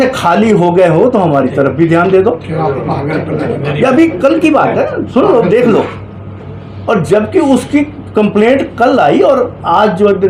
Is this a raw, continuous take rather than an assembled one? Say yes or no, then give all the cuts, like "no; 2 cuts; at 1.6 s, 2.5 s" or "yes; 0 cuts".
yes; 0 cuts